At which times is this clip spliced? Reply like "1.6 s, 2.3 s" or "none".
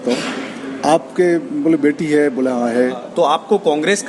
3.0 s